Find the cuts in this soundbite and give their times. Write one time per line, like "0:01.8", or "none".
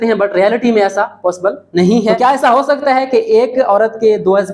0:02.2